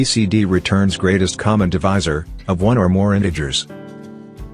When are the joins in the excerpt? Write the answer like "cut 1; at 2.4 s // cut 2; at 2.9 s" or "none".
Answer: none